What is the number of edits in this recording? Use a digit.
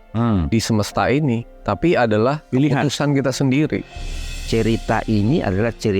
1